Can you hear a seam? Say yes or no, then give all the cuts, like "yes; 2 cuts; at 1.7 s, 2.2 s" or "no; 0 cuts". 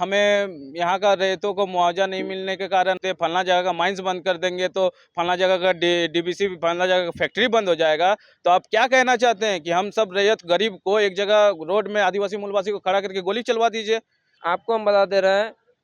yes; 2 cuts; at 3.0 s, 14.4 s